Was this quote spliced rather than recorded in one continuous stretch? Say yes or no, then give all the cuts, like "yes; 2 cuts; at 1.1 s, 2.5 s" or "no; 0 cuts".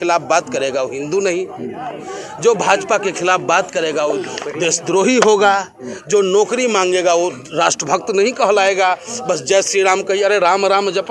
no; 0 cuts